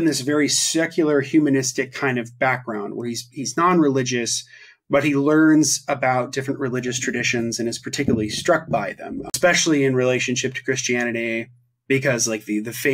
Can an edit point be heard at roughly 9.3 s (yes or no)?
yes